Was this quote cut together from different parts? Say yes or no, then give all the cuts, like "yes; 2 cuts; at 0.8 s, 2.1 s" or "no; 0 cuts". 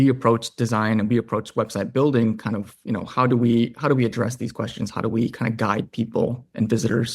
no; 0 cuts